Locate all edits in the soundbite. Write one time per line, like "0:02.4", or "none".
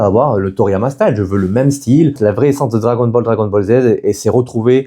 0:02.2